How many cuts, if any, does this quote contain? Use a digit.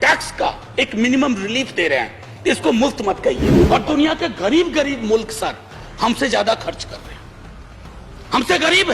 1